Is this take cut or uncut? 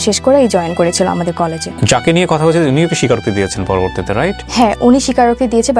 cut